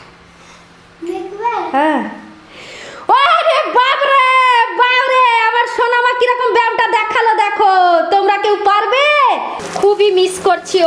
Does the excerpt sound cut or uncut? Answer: cut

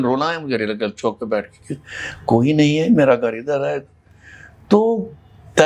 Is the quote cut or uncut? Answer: uncut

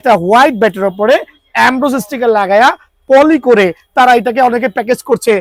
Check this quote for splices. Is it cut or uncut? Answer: uncut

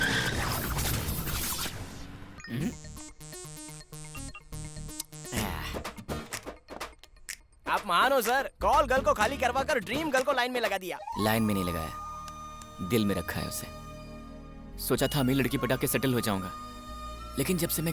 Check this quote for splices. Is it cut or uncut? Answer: cut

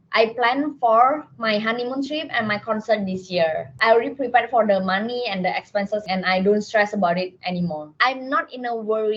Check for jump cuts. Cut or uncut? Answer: cut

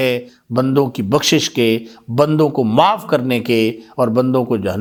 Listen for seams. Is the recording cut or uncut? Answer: uncut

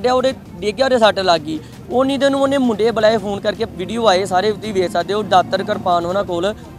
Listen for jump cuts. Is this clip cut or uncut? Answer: cut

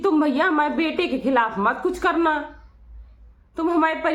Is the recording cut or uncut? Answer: uncut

